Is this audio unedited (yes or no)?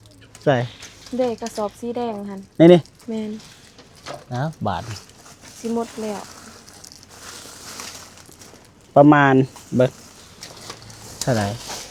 yes